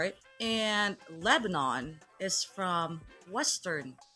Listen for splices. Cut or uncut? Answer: uncut